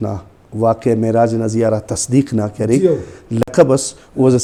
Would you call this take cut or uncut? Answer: uncut